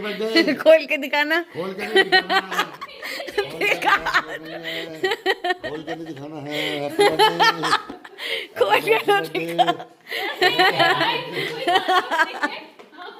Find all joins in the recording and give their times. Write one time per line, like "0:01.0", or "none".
none